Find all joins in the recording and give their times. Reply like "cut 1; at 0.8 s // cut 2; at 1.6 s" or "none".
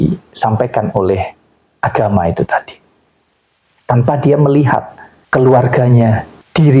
none